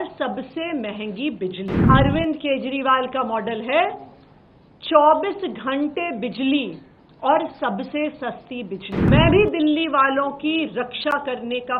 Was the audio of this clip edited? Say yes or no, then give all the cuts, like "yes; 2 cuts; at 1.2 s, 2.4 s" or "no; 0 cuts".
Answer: yes; 2 cuts; at 1.8 s, 9.1 s